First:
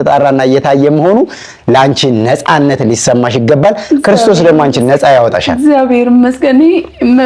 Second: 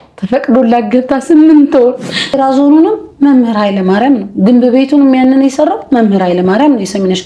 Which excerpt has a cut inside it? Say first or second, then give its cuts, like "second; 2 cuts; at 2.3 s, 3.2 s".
second; 1 cut; at 2.4 s